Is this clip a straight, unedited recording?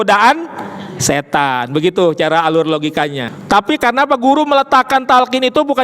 no; 1 cut; at 3.2 s

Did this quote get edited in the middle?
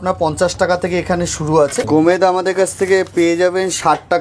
yes; 1 cut; at 1.8 s

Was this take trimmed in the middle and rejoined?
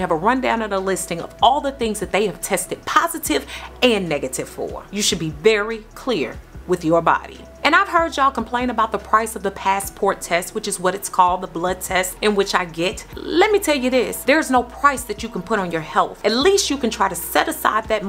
no; 0 cuts

